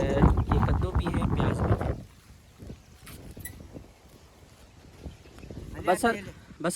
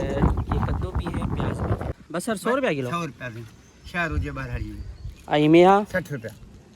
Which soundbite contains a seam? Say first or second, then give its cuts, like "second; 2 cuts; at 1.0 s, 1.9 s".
second; 1 cut; at 2.0 s